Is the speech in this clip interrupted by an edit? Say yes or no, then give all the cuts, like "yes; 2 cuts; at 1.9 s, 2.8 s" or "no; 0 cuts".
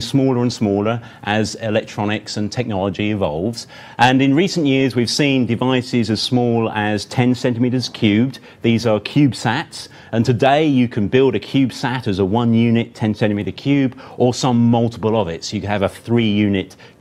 yes; 1 cut; at 1.9 s